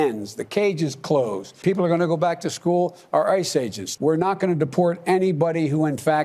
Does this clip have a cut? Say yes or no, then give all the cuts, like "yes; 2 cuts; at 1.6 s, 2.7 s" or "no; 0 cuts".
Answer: yes; 2 cuts; at 1.6 s, 3.8 s